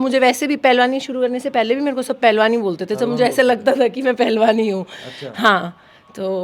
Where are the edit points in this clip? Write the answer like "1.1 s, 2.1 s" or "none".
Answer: none